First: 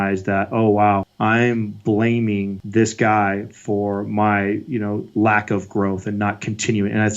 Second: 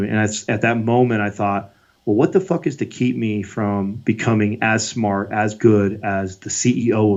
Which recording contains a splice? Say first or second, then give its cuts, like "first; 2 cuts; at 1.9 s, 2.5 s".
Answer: first; 2 cuts; at 1.1 s, 2.6 s